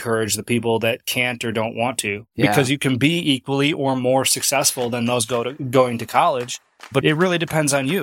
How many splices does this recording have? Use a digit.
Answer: 1